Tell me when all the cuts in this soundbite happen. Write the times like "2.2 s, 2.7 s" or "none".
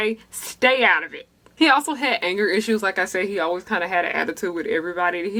none